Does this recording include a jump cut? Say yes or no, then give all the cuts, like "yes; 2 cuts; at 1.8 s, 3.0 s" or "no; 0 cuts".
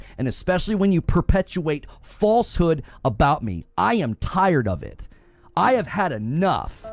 no; 0 cuts